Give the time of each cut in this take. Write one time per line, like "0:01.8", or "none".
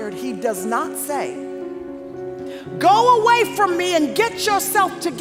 none